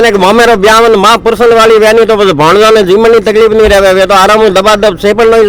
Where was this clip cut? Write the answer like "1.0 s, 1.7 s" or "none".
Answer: none